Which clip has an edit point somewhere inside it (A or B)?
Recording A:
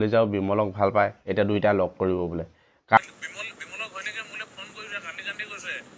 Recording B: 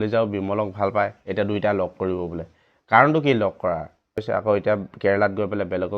A